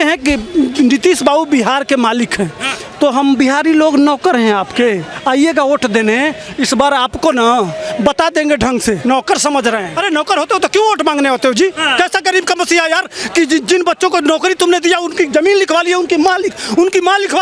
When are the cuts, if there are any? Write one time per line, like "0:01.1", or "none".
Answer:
0:05.1
0:09.0
0:09.9
0:11.8

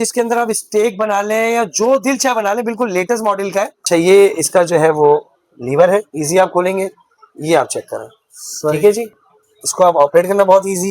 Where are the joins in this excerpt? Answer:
0:03.8
0:09.1

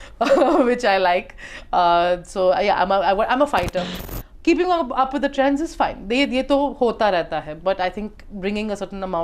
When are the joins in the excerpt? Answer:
0:03.9

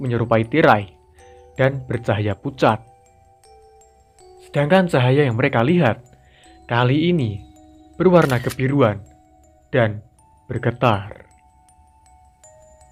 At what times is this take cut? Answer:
none

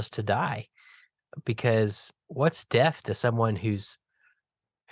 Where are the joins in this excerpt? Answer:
0:02.1

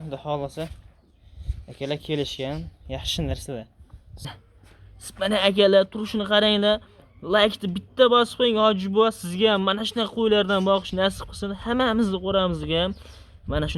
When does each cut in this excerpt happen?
0:04.3

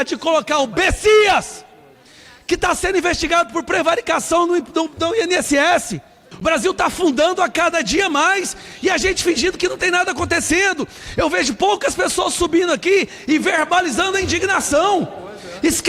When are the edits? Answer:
0:06.3

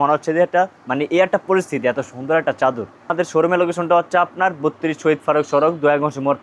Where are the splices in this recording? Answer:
0:03.1

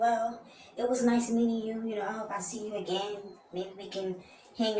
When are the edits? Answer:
none

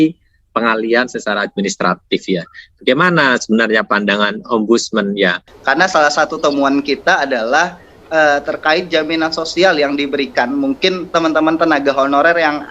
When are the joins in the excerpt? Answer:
0:05.5

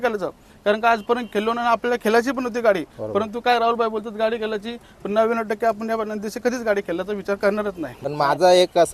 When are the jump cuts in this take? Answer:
0:08.0

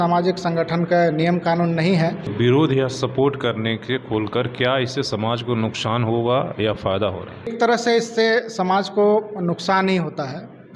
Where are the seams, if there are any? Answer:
0:02.3
0:07.5

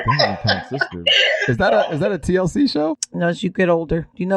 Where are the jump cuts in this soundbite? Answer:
0:03.1

